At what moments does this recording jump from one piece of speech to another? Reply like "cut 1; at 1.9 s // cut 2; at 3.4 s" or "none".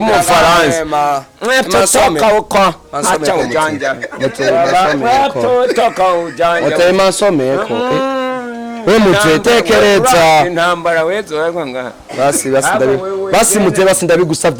none